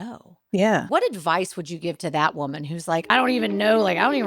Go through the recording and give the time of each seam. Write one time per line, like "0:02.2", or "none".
0:00.9
0:03.1

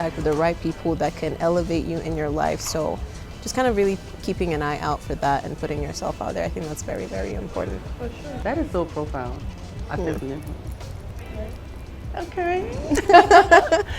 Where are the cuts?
0:08.4

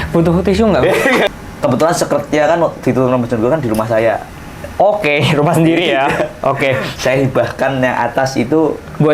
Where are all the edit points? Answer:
0:01.3

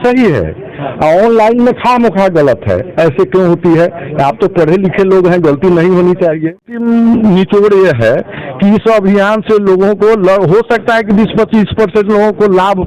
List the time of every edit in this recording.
0:06.8

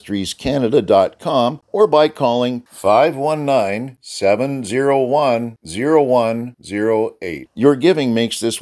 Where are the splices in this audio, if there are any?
0:01.6

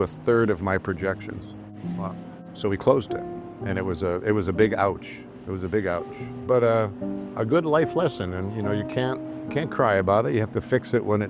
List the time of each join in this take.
none

